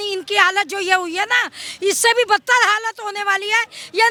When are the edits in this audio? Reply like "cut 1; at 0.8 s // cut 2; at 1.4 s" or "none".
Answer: none